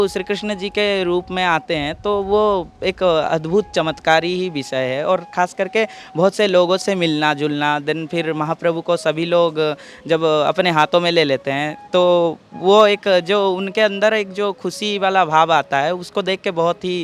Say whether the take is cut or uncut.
uncut